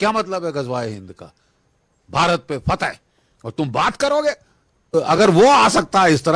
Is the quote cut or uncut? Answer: cut